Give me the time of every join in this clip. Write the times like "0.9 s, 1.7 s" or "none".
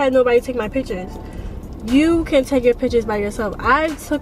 none